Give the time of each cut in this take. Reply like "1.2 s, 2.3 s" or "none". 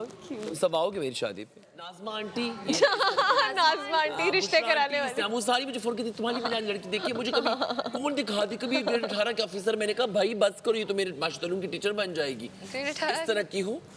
2.0 s